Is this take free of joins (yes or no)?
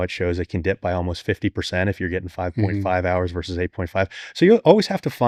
yes